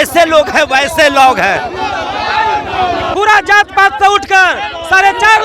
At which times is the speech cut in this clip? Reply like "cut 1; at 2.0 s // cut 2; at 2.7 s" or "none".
cut 1; at 3.1 s